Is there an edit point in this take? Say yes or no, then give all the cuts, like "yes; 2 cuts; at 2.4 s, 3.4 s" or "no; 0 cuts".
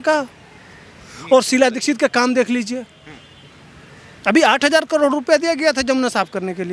no; 0 cuts